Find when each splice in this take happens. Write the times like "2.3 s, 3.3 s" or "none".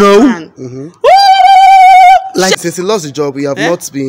2.6 s